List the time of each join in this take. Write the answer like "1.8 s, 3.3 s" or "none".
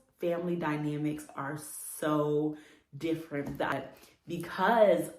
3.7 s